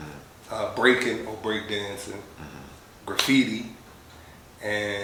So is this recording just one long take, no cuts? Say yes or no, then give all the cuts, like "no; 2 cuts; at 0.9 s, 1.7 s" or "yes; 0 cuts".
yes; 0 cuts